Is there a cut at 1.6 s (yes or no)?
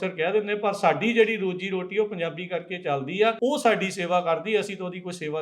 no